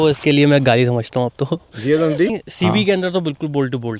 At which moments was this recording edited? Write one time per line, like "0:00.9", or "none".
0:02.4